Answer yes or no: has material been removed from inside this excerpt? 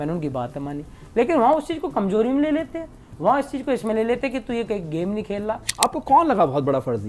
yes